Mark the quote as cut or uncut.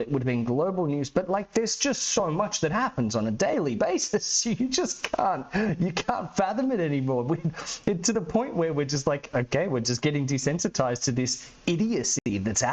uncut